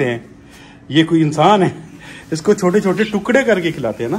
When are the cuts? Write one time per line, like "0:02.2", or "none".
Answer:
none